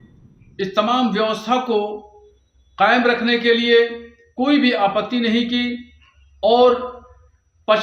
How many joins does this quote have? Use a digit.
0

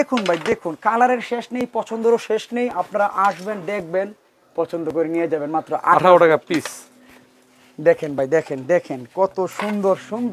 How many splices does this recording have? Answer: 0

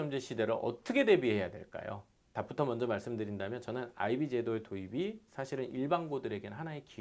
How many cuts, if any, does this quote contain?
0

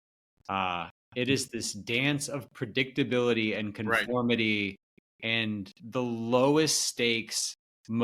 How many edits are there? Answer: 1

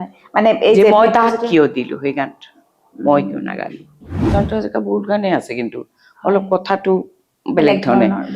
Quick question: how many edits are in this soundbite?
1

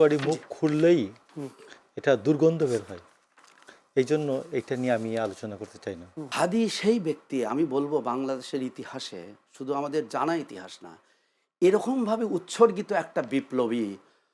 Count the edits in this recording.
1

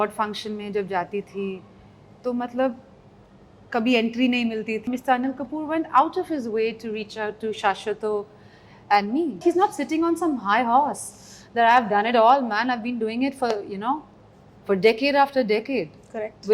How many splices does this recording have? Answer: 2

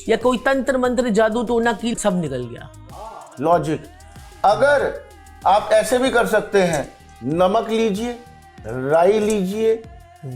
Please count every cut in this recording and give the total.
1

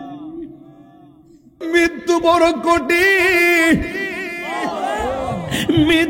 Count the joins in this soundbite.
1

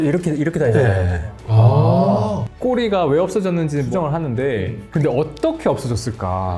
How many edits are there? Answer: 3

